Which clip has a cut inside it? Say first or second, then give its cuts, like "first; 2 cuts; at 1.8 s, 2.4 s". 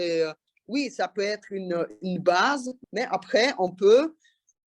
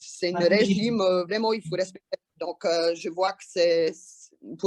first; 1 cut; at 2.8 s